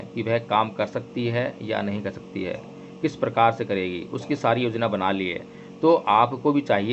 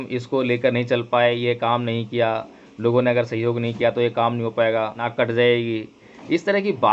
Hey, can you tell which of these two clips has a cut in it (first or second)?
second